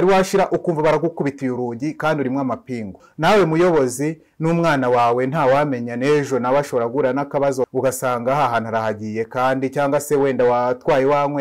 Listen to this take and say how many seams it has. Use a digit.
2